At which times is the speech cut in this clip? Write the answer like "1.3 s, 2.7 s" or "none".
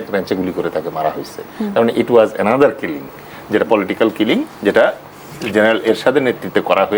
none